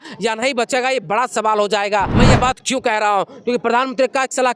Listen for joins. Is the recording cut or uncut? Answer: cut